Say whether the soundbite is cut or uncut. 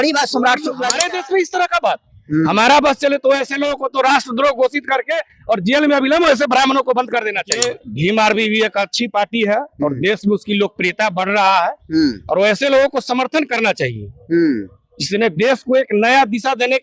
cut